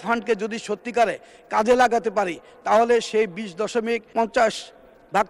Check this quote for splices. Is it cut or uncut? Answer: cut